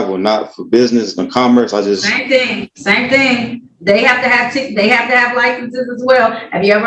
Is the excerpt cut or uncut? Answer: uncut